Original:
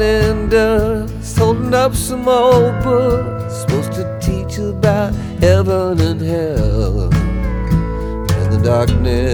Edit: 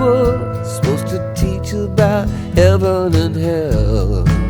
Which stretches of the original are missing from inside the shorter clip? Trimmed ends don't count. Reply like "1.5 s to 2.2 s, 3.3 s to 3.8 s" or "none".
none